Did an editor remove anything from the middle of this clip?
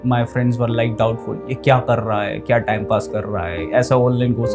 no; 0 cuts

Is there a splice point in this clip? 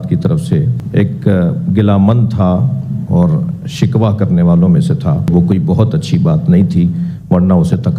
yes; 1 cut; at 5.3 s

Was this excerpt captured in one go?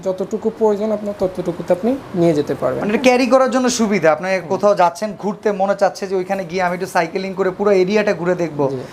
yes; 0 cuts

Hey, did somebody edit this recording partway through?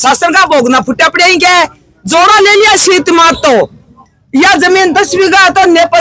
no; 0 cuts

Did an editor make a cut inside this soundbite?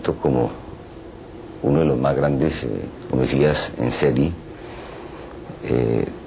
no; 0 cuts

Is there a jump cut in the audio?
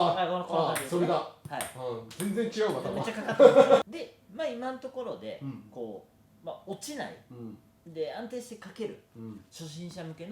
yes; 1 cut; at 3.8 s

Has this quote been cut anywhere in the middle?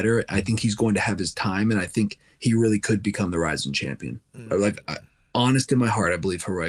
no; 0 cuts

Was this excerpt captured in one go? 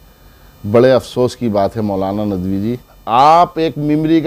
no; 1 cut; at 2.9 s

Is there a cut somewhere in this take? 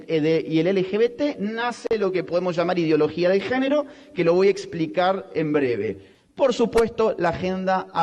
yes; 1 cut; at 6.1 s

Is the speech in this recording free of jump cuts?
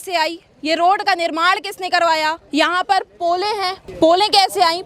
no; 2 cuts; at 2.4 s, 3.8 s

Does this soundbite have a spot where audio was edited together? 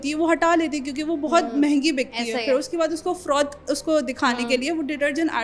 no; 0 cuts

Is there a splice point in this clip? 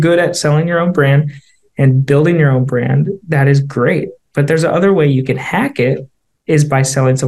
no; 0 cuts

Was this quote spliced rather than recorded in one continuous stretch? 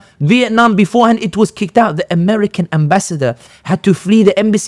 no; 0 cuts

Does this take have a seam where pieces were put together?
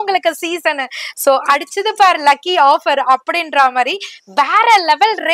no; 0 cuts

